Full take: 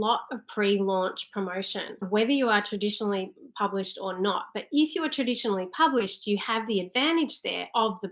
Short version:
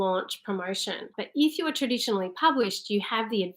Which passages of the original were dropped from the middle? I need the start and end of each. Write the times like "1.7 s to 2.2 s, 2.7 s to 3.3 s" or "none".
2.0 s to 4.5 s